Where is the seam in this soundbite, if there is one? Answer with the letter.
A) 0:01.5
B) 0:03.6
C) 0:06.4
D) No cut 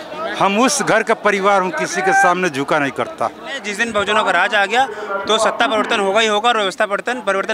B